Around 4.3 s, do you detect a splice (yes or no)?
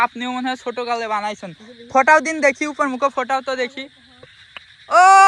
yes